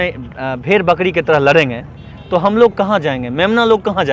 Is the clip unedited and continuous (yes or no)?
yes